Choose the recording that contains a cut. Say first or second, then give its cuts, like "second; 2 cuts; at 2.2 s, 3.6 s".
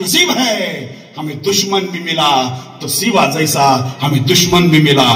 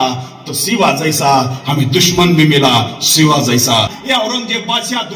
second; 1 cut; at 4.0 s